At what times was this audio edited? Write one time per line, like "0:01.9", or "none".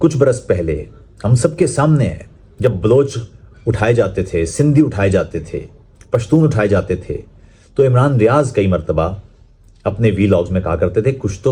none